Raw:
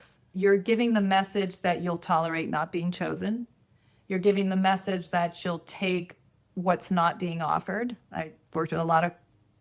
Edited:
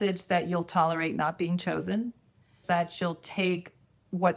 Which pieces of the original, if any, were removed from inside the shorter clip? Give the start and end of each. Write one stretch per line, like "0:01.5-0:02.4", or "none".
0:03.9-0:05.0